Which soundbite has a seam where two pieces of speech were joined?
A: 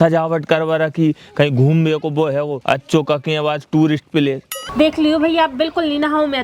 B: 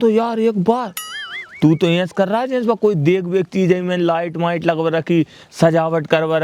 A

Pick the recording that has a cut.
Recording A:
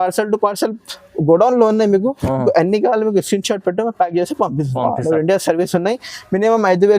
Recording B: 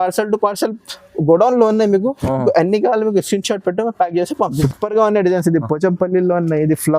B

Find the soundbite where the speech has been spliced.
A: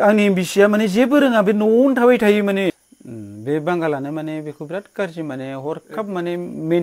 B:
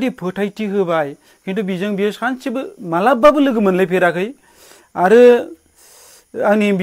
A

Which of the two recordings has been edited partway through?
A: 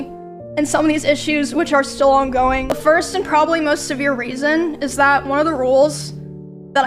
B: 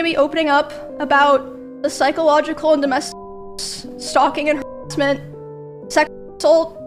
A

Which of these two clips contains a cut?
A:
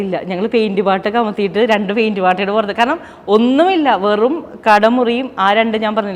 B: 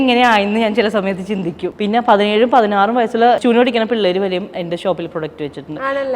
B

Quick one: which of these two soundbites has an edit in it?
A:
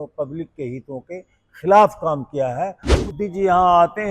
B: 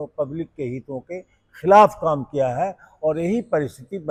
A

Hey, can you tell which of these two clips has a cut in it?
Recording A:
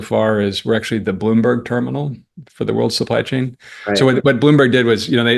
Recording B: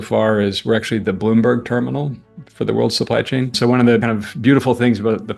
B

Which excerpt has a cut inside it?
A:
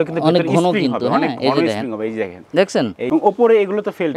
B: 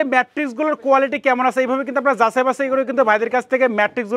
A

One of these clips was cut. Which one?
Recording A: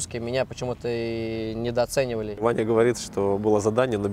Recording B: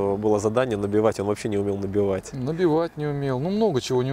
A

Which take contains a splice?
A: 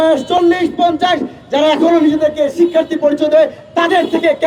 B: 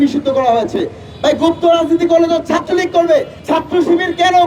B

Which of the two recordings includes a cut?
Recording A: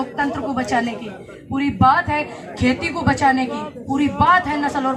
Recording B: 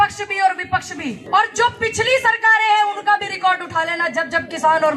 B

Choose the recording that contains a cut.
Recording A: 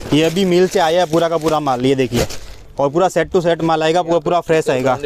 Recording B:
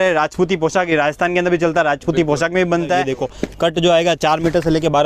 B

